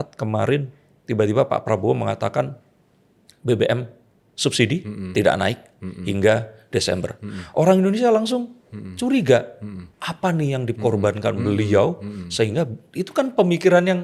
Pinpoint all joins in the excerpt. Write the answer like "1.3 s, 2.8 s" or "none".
none